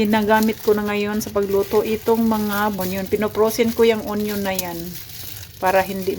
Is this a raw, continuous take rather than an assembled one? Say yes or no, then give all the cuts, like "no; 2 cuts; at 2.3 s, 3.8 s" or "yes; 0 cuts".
no; 1 cut; at 2.8 s